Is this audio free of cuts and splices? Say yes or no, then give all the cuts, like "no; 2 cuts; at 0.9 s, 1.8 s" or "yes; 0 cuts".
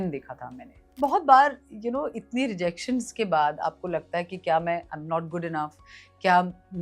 no; 1 cut; at 1.0 s